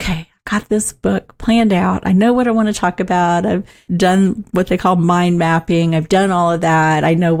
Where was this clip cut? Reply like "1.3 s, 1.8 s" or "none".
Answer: none